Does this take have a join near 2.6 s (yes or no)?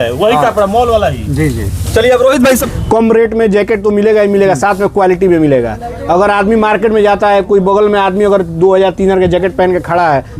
yes